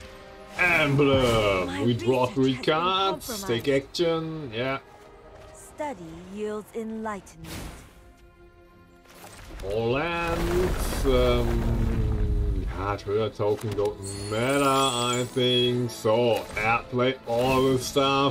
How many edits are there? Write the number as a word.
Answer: zero